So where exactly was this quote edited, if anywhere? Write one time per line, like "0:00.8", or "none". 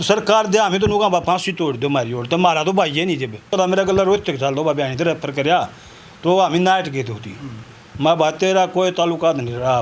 0:03.5